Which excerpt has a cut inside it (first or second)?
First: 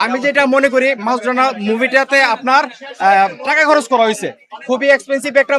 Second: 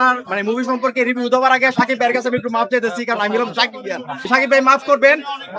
second